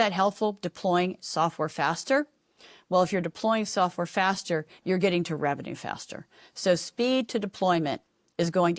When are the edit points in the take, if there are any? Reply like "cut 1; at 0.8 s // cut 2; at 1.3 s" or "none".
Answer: none